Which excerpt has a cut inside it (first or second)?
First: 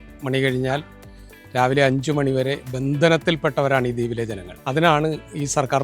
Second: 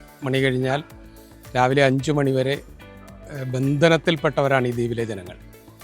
first